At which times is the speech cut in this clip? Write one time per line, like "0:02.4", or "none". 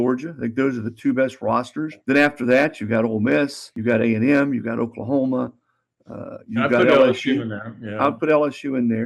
0:02.0
0:03.7